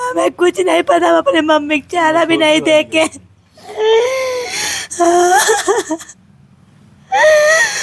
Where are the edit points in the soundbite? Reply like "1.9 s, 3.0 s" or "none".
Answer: none